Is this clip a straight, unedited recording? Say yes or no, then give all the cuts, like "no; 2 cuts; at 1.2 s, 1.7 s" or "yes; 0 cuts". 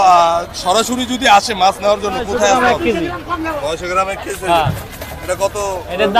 no; 1 cut; at 2.5 s